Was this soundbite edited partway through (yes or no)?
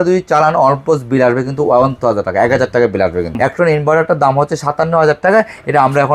yes